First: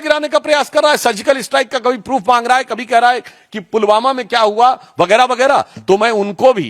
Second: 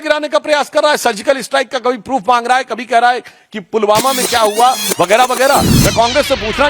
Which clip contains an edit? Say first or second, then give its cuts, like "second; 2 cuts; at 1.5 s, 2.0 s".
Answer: second; 1 cut; at 5.7 s